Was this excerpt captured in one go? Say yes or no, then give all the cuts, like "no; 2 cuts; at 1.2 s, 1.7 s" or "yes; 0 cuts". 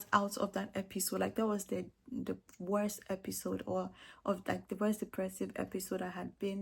yes; 0 cuts